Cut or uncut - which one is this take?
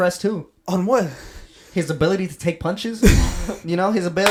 uncut